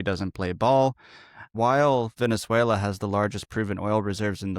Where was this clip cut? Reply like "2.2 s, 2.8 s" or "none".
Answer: 1.5 s